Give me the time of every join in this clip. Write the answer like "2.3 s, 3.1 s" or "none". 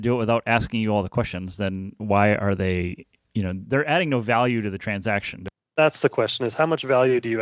5.4 s